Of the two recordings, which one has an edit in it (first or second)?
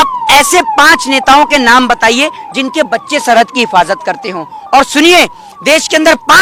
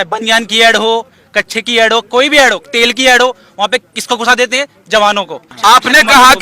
second